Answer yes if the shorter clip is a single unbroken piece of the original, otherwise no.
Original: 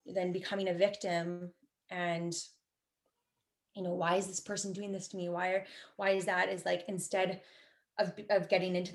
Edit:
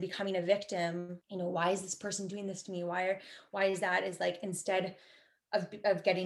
no